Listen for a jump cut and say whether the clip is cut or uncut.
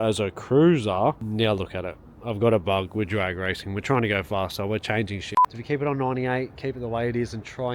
cut